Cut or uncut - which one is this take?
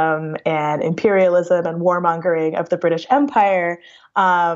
uncut